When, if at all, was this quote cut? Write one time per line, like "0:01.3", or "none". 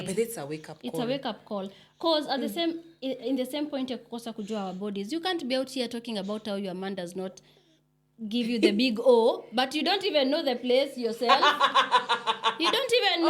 none